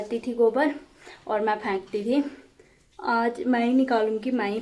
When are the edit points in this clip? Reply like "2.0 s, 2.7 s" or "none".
none